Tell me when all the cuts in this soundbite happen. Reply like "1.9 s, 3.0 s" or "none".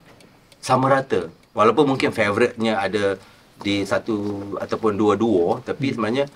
none